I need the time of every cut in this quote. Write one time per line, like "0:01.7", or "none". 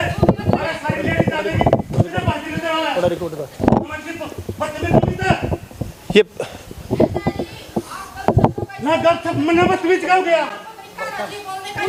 none